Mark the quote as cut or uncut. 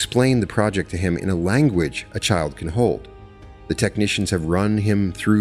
uncut